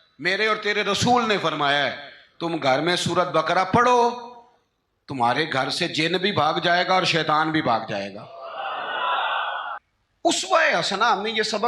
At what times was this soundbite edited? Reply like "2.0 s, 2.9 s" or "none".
9.8 s